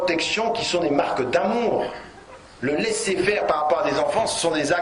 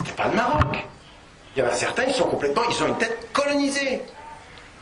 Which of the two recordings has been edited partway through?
first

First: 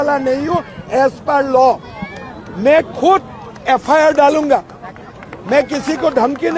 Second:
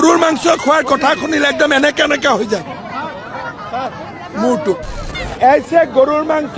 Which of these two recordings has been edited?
second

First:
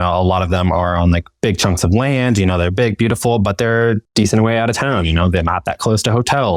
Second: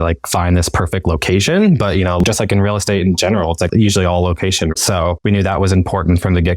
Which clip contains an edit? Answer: second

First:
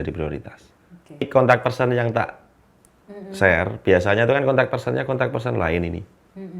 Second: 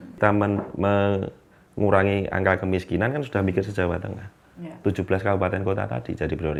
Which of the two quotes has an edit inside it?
first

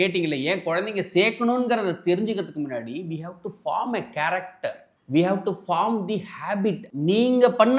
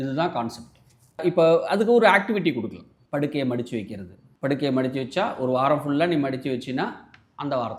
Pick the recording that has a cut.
first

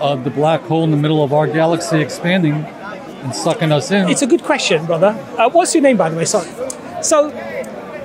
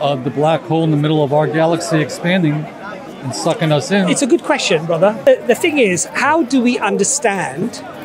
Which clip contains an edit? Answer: second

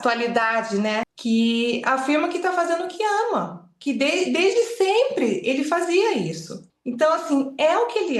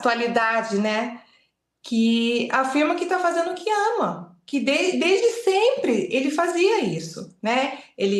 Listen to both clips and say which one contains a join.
first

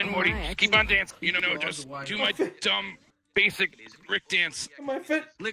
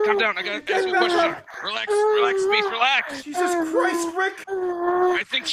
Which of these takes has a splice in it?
first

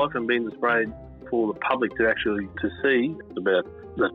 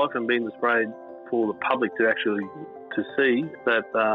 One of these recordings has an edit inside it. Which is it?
first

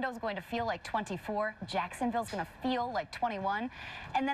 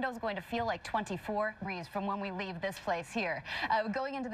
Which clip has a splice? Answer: first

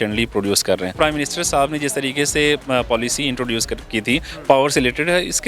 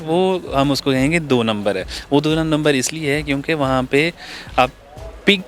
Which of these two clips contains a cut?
first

